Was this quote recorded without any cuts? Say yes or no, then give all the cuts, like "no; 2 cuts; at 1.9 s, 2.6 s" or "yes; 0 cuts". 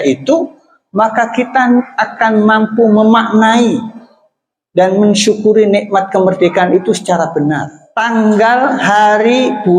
no; 1 cut; at 7.8 s